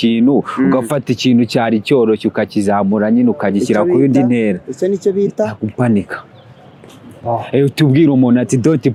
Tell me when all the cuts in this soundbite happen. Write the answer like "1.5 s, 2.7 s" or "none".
none